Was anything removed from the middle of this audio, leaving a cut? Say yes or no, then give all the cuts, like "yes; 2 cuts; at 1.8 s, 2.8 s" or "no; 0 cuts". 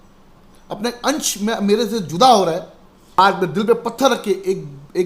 yes; 1 cut; at 3.2 s